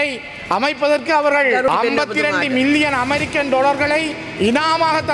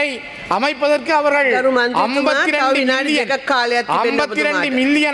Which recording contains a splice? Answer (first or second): first